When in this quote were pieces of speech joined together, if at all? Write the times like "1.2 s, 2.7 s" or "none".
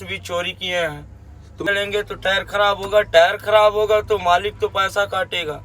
1.7 s